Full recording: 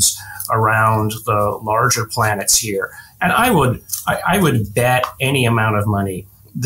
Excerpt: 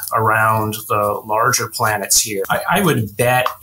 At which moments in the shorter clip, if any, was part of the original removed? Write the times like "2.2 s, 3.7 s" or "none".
2.5 s